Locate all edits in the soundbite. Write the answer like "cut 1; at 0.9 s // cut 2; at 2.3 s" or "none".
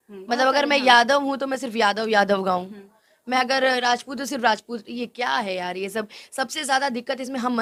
none